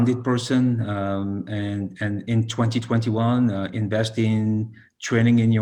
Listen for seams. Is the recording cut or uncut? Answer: uncut